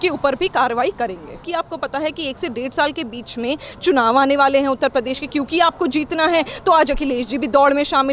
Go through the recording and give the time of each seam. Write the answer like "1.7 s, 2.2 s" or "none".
1.3 s